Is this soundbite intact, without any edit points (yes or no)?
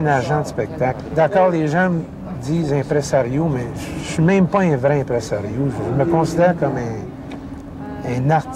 yes